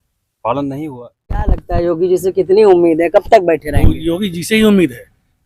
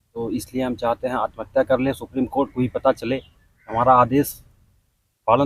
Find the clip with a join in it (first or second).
first